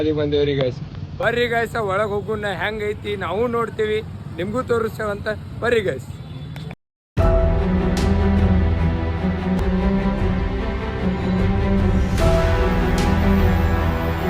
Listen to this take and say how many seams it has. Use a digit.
1